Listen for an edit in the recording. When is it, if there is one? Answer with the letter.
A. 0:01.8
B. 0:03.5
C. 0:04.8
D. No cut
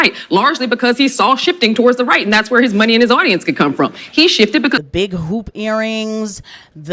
C